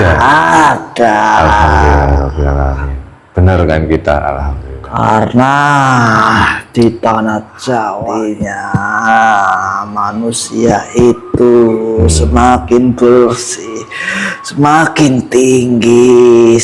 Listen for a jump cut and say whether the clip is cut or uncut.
cut